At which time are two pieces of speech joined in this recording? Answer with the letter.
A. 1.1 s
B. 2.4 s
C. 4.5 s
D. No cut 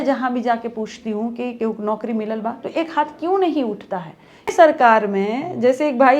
C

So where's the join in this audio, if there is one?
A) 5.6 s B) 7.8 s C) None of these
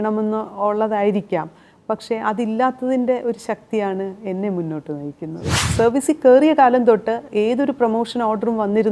A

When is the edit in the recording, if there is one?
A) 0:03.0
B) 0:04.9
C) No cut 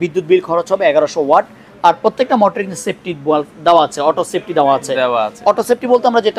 C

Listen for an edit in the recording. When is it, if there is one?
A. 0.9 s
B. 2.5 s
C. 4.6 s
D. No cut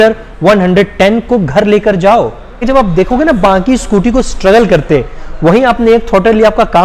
B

